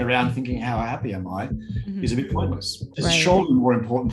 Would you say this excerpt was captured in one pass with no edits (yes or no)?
no